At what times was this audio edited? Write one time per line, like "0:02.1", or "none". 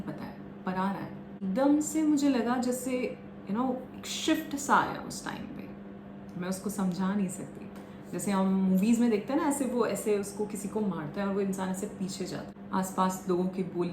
0:01.4
0:12.5